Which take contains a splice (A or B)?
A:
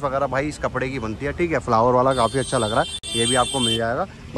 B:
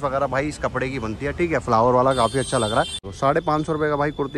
B